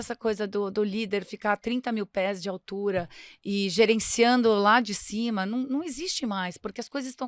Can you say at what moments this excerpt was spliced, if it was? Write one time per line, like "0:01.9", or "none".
none

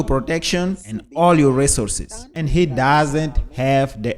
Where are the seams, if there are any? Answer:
0:02.3

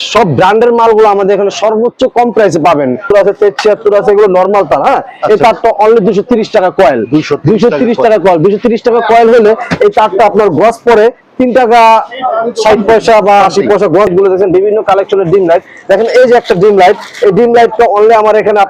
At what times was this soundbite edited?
0:03.1
0:14.1

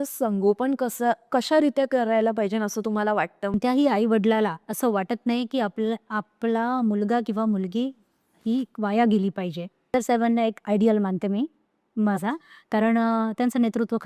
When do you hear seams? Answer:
0:03.6
0:09.9

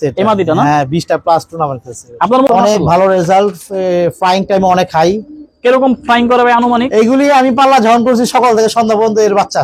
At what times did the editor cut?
0:02.5

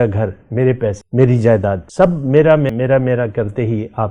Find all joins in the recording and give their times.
0:01.0
0:01.8
0:02.7

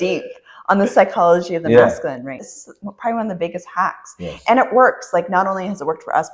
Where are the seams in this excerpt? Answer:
0:02.4

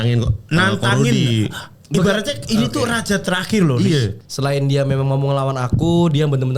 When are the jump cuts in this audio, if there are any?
0:04.1

